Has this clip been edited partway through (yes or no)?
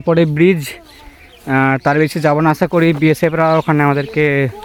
no